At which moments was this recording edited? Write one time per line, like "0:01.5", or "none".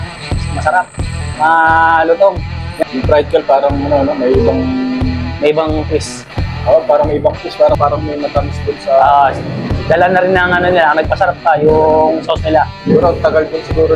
0:02.6
0:07.8